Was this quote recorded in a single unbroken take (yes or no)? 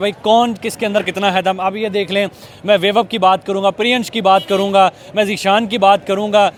yes